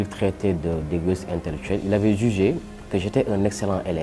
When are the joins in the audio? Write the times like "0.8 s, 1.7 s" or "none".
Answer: none

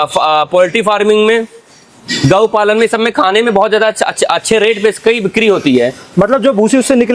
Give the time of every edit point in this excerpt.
none

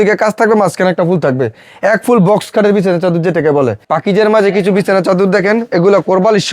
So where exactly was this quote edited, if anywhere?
3.8 s

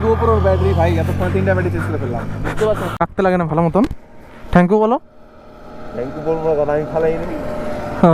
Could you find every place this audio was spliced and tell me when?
3.0 s

